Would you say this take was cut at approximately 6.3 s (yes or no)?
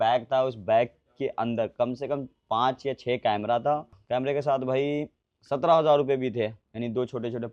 no